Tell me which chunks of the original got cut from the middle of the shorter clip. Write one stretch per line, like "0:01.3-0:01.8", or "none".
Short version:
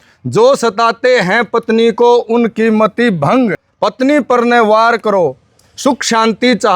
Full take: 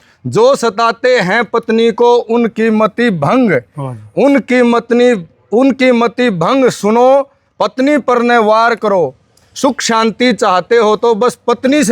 0:03.6-0:07.4